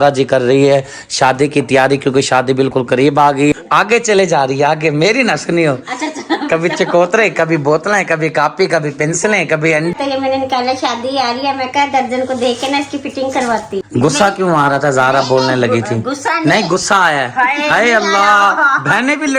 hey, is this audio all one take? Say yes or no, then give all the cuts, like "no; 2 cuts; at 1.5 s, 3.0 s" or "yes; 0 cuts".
no; 3 cuts; at 3.5 s, 9.9 s, 13.8 s